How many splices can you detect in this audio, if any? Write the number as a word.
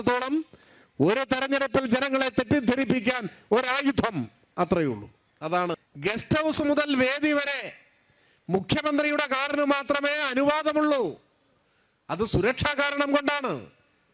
one